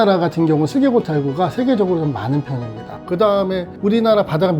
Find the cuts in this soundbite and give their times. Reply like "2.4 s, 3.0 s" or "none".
2.9 s